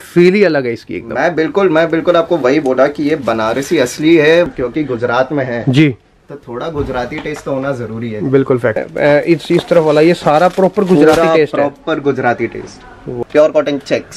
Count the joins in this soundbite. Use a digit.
3